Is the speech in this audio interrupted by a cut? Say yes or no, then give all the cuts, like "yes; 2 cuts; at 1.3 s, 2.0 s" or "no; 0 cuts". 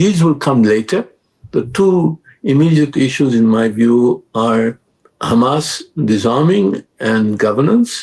no; 0 cuts